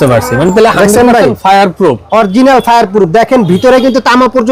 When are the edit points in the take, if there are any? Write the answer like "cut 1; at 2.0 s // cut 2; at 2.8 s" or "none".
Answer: none